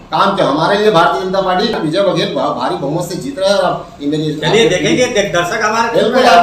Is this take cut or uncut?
cut